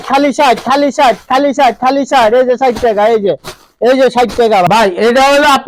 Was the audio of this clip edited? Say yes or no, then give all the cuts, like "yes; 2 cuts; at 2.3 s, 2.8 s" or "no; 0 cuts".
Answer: no; 0 cuts